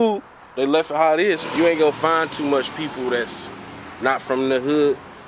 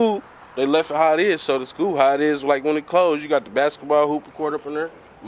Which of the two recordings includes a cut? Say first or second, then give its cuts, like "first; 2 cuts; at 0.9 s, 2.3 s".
first; 1 cut; at 1.4 s